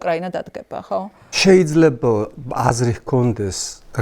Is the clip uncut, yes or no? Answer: no